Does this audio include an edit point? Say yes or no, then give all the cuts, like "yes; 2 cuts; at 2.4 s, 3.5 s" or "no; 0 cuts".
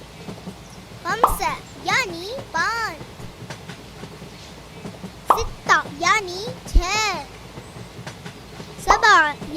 yes; 5 cuts; at 1.0 s, 3.0 s, 4.6 s, 7.3 s, 8.8 s